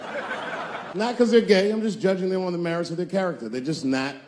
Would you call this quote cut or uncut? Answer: cut